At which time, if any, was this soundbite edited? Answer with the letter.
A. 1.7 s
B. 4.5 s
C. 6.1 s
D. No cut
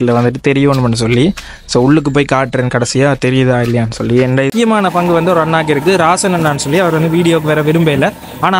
B